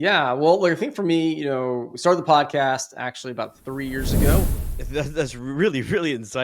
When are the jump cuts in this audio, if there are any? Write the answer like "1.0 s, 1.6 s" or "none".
4.4 s